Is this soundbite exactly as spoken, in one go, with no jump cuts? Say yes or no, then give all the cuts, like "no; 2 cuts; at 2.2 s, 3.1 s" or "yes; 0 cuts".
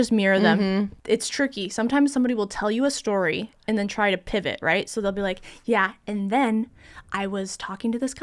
no; 1 cut; at 0.9 s